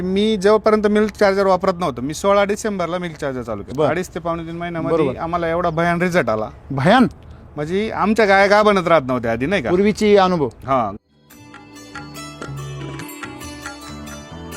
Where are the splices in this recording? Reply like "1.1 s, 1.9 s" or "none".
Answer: 3.7 s, 10.9 s